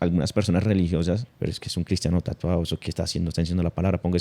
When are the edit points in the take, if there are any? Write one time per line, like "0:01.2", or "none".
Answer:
0:01.3